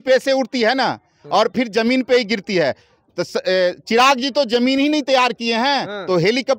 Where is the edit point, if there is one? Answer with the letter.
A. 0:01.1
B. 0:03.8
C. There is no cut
C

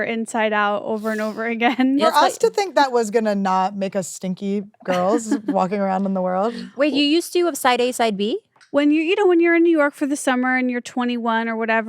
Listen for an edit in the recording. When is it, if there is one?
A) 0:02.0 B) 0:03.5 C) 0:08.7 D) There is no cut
A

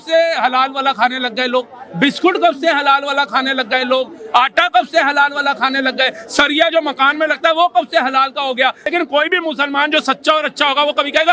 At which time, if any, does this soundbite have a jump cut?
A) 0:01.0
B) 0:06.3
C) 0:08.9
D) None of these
C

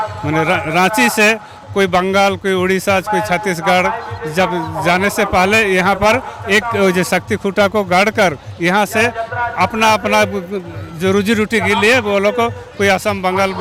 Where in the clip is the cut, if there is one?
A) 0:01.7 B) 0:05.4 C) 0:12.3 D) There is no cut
D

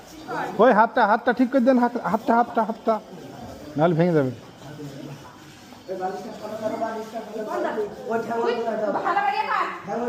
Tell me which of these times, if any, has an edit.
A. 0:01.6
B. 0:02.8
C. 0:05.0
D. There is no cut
D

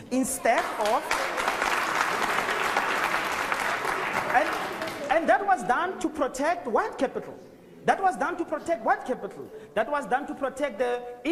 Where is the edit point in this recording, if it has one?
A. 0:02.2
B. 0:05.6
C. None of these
C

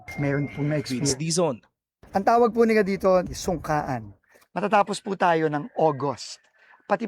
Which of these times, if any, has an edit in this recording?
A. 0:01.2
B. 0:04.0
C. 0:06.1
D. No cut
A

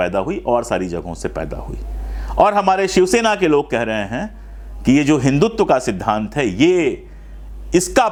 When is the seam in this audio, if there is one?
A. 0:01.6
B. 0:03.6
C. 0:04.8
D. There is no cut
D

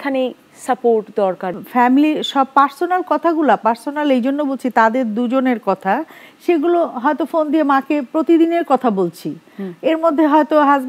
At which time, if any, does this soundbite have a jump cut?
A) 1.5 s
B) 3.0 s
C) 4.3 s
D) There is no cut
A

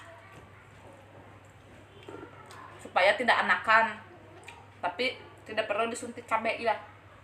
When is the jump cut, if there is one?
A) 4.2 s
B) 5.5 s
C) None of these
C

